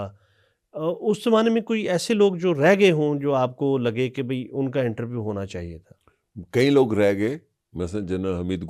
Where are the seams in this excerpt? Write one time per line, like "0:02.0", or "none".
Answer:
none